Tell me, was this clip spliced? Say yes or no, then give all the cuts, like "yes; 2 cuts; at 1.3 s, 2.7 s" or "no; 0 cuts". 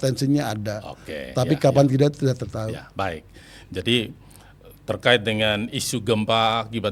no; 0 cuts